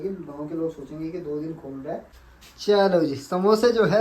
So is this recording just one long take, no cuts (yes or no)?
no